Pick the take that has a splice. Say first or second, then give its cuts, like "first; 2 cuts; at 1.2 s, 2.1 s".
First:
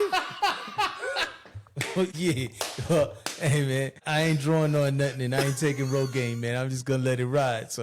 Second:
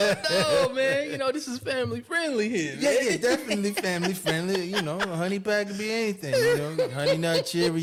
first; 2 cuts; at 2.1 s, 4.0 s